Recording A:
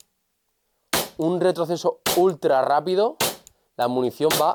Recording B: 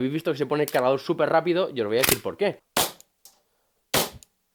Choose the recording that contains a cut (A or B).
B